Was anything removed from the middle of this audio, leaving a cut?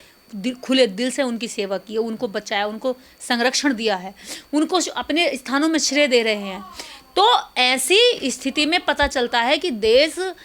no; 0 cuts

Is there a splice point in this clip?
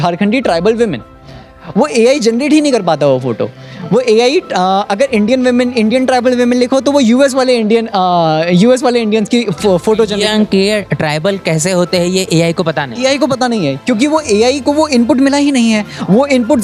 no; 0 cuts

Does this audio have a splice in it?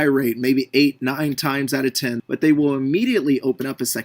yes; 1 cut; at 2.2 s

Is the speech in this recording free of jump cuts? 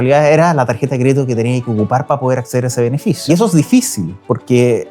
no; 1 cut; at 3.1 s

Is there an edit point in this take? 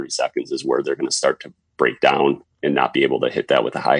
yes; 1 cut; at 2.6 s

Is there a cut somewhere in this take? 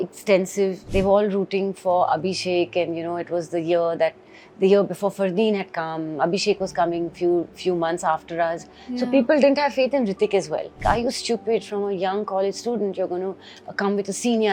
yes; 2 cuts; at 0.8 s, 10.8 s

